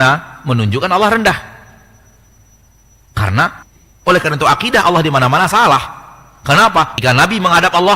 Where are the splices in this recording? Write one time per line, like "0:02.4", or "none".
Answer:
0:03.6
0:06.9